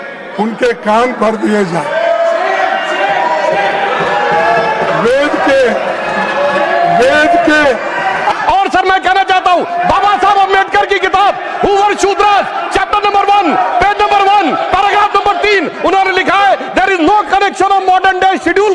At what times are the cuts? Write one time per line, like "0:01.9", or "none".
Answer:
0:08.4